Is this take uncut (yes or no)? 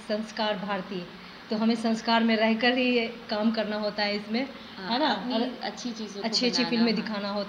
yes